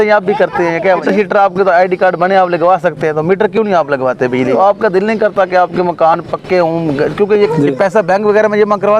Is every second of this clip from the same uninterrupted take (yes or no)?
no